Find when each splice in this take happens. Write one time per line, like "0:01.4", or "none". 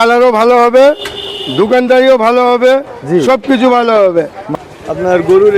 0:04.5